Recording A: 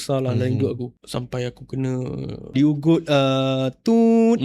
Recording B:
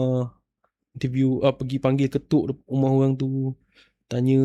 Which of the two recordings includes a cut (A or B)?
A